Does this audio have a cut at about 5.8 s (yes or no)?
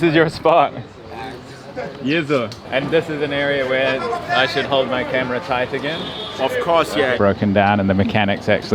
no